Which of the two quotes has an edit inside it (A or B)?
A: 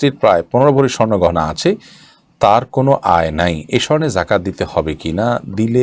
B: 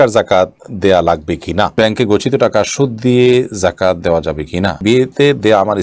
B